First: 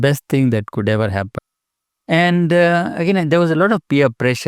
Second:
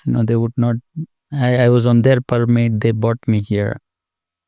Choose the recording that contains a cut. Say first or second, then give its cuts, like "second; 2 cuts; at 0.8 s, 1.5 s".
first; 1 cut; at 1.4 s